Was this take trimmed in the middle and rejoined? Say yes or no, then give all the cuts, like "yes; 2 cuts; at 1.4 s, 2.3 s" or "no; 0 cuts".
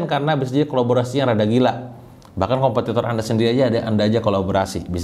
no; 0 cuts